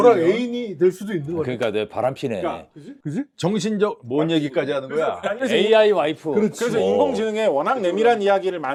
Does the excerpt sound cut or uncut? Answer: uncut